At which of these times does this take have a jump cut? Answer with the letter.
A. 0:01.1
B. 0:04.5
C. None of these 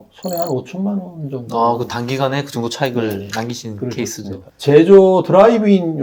B